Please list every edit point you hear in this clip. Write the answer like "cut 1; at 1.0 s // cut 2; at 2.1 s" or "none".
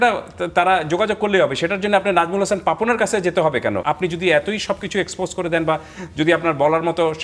cut 1; at 3.8 s

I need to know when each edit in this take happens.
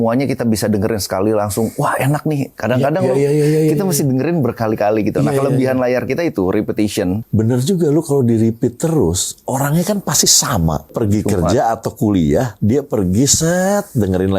cut 1; at 7.2 s // cut 2; at 10.9 s

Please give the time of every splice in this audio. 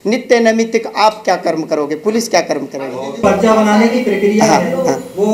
cut 1; at 3.2 s

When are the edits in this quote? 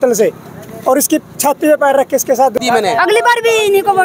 cut 1; at 2.6 s

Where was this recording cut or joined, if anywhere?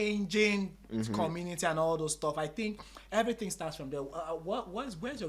none

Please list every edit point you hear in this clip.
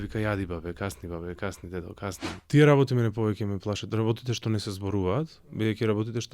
cut 1; at 2.3 s

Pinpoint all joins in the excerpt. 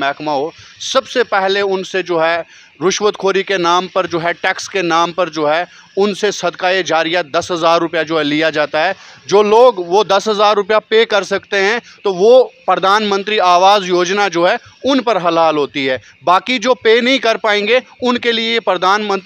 none

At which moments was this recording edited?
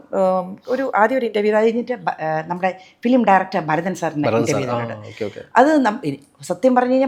none

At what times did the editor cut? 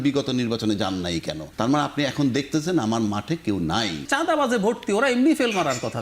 cut 1; at 1.4 s // cut 2; at 4.1 s

